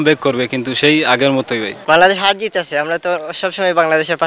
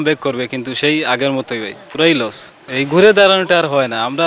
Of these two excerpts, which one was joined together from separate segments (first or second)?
first